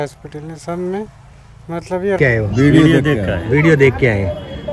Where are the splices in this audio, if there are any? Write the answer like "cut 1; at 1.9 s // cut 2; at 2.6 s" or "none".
cut 1; at 2.2 s